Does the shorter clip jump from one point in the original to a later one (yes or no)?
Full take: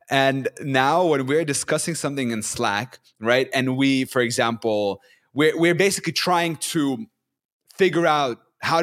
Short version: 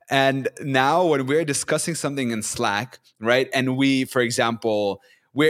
no